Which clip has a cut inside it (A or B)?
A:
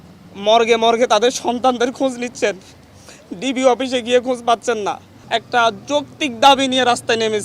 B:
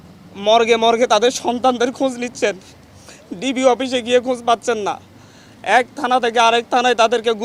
A